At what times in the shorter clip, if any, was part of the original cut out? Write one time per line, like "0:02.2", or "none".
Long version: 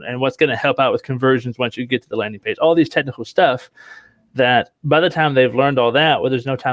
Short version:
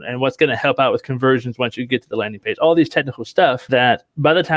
0:03.6

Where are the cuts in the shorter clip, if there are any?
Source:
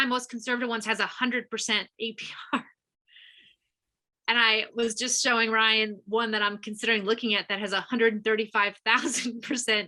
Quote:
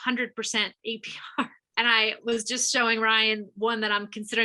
0:01.6

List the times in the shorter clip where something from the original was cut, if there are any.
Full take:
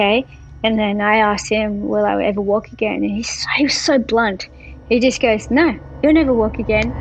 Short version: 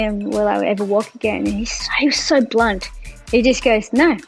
none

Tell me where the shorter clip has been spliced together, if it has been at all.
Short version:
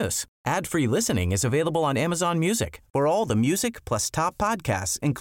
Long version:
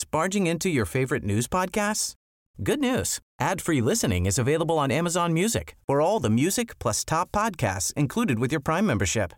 none

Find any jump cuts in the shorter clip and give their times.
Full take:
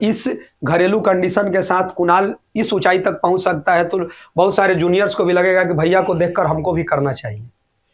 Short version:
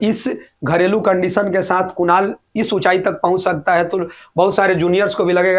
none

